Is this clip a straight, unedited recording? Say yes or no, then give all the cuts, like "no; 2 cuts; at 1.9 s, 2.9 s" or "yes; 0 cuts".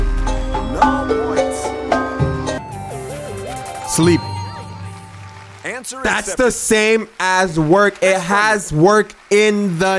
no; 1 cut; at 2.6 s